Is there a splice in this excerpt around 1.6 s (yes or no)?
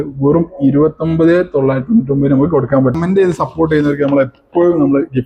no